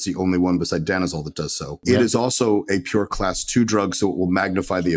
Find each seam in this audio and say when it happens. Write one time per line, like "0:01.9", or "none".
0:01.8